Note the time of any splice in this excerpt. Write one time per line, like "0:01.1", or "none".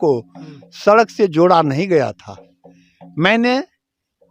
none